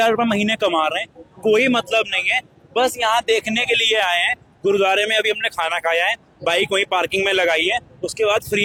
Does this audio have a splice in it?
no; 0 cuts

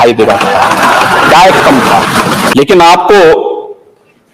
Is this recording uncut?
no; 1 cut; at 2.4 s

